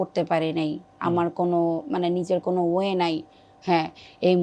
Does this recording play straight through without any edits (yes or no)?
yes